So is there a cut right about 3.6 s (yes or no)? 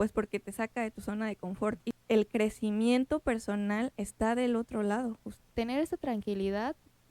no